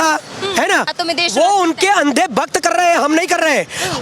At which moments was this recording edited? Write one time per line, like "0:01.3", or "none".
0:00.9